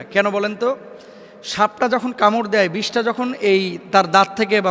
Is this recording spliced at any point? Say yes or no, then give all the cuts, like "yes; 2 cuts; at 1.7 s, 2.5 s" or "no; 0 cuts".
no; 0 cuts